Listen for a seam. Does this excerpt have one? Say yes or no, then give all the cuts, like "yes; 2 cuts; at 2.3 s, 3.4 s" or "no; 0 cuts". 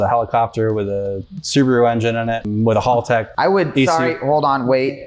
yes; 2 cuts; at 2.4 s, 3.3 s